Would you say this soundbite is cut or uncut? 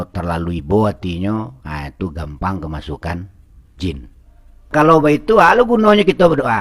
cut